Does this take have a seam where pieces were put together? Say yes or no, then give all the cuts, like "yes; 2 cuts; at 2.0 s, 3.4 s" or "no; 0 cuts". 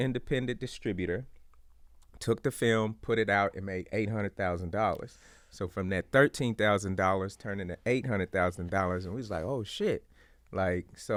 no; 0 cuts